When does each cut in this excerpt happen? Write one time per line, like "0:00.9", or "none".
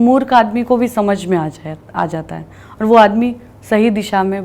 none